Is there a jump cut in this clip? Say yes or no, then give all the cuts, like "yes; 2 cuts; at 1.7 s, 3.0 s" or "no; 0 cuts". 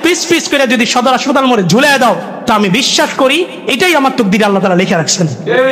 no; 0 cuts